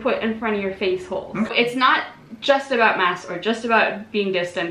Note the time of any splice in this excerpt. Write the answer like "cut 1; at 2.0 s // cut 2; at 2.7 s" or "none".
cut 1; at 1.5 s